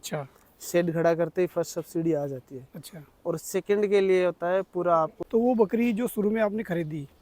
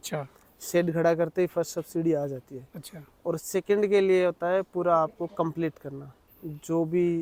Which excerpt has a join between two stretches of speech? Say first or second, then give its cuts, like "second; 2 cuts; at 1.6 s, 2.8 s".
first; 1 cut; at 5.2 s